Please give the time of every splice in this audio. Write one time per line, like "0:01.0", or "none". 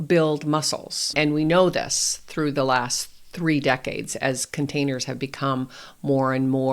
0:01.1